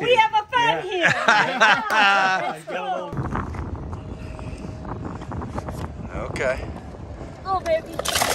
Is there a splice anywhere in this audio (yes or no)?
yes